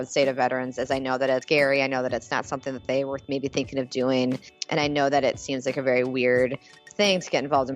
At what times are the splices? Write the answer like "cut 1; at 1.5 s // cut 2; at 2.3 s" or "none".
cut 1; at 1.4 s // cut 2; at 4.5 s